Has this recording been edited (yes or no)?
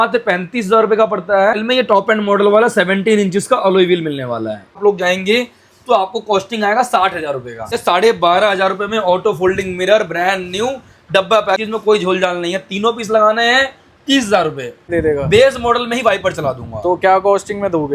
yes